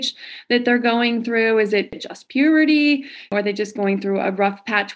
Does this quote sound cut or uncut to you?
cut